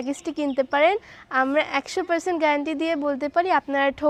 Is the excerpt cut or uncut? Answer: uncut